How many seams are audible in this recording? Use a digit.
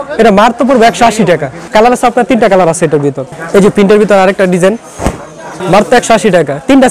0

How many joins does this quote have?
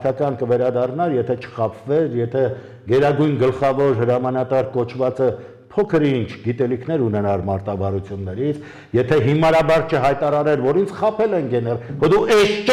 0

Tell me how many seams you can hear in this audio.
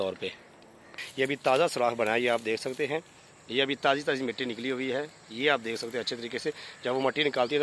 1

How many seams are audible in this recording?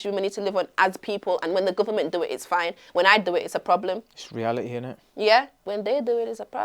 1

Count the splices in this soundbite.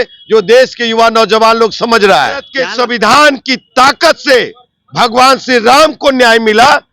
1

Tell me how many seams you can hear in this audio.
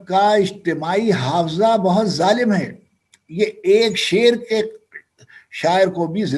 0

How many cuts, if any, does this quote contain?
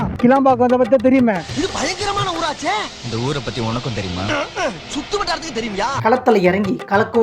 1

